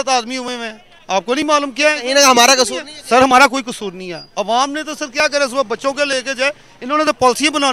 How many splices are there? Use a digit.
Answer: 0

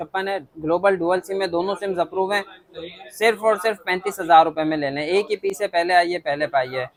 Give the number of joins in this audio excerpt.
0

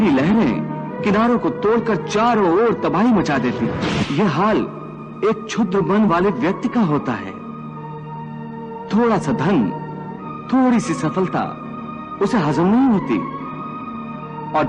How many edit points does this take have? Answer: 1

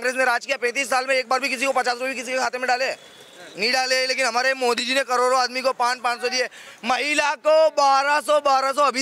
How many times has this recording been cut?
0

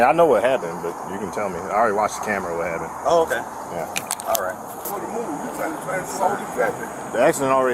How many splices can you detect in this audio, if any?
1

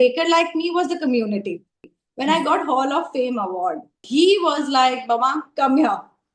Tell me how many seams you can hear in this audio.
2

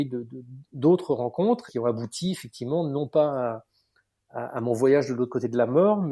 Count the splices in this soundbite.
1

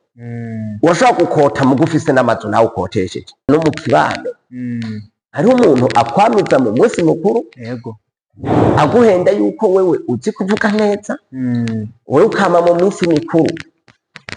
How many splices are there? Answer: 1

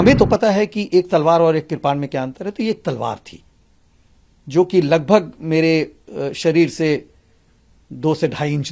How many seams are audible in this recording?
0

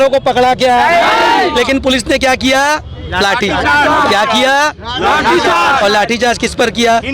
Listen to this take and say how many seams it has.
0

